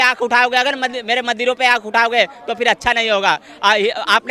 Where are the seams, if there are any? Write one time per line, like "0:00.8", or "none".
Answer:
none